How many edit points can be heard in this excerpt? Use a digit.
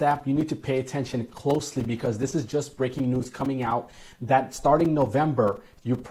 0